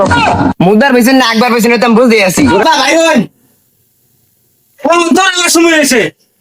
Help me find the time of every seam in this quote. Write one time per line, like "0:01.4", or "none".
0:02.6